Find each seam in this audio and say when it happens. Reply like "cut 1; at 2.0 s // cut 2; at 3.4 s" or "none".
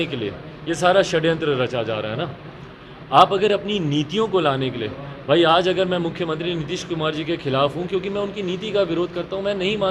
none